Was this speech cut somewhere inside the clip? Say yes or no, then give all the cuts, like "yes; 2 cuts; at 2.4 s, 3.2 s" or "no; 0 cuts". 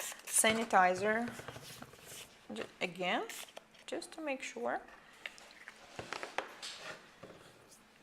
yes; 1 cut; at 1.3 s